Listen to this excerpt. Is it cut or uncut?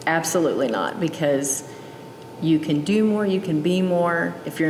uncut